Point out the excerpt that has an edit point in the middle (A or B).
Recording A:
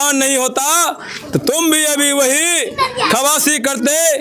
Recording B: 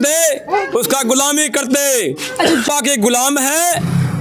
B